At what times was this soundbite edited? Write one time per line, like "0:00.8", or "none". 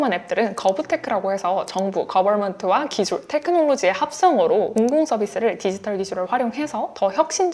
none

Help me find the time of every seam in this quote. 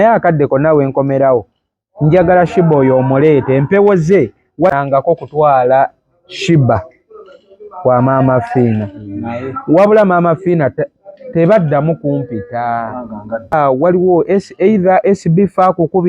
0:04.7
0:13.5

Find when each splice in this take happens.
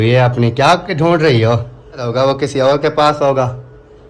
0:02.1

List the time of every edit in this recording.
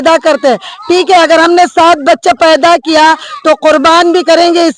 none

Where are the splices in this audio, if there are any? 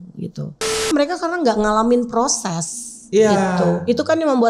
0:00.9

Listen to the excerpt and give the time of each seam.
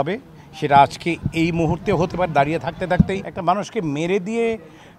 0:03.3

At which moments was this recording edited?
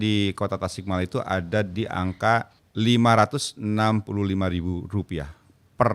0:02.6

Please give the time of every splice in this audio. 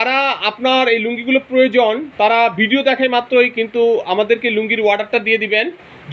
none

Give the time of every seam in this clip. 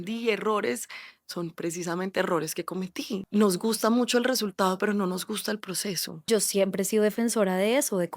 0:03.2
0:06.3

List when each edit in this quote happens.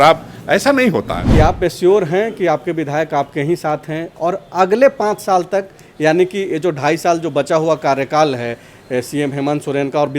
0:01.2

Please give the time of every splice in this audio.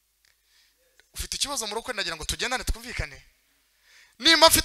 none

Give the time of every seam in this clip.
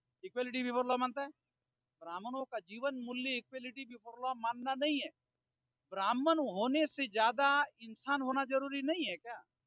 none

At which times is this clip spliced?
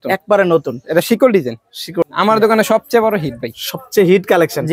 0:02.1

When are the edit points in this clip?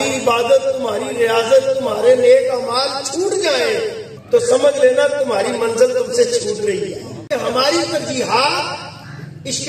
0:04.1
0:07.2

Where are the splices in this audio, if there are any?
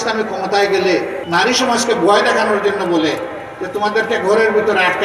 0:01.2

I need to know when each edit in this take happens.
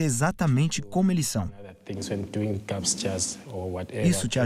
none

